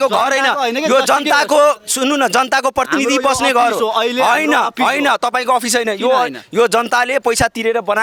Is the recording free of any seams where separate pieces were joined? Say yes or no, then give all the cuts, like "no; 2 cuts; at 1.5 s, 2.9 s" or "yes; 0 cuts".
yes; 0 cuts